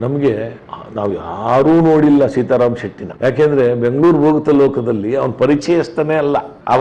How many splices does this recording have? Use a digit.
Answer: 0